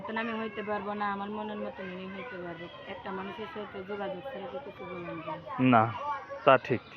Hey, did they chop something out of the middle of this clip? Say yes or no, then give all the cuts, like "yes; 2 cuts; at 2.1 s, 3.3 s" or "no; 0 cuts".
no; 0 cuts